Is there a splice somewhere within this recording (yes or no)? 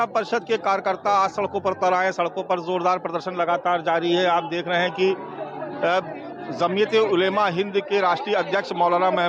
no